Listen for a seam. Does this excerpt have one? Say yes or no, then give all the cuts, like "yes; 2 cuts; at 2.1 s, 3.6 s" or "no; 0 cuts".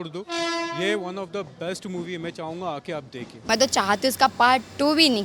yes; 1 cut; at 3.5 s